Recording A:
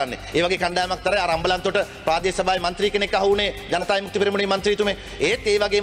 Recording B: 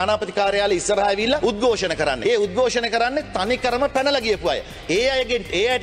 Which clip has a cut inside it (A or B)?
B